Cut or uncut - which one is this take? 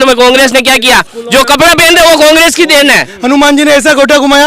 cut